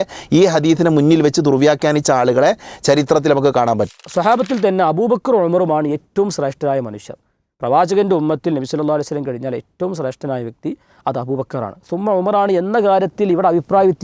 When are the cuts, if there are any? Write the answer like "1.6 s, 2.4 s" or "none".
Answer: 4.0 s